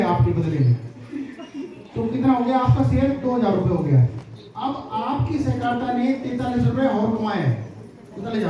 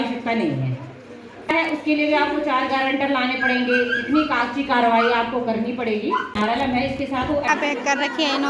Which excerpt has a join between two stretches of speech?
second; 2 cuts; at 1.5 s, 7.5 s

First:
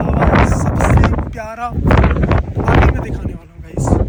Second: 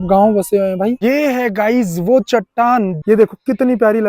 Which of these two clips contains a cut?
second; 2 cuts; at 1.0 s, 3.0 s

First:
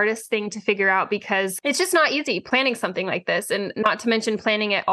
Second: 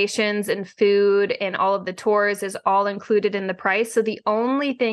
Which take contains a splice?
first; 3 cuts; at 1.5 s, 2.4 s, 3.7 s

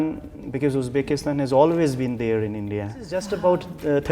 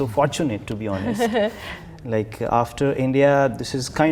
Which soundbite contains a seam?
first; 1 cut; at 3.2 s

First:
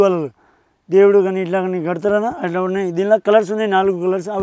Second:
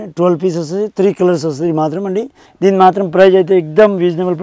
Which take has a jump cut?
second; 1 cut; at 2.4 s

